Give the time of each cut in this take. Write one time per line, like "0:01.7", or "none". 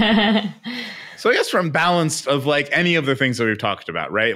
none